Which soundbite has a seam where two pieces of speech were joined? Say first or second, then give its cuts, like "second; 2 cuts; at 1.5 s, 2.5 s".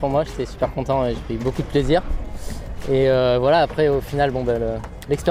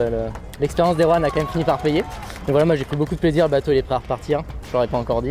second; 1 cut; at 2.3 s